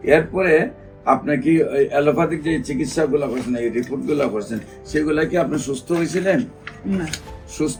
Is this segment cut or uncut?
uncut